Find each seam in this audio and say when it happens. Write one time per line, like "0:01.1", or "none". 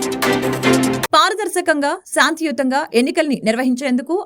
0:01.0